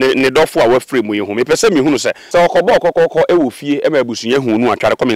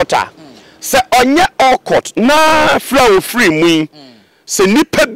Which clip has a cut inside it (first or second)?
first